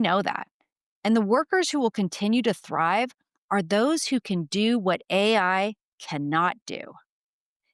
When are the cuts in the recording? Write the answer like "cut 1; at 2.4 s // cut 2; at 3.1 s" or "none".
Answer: none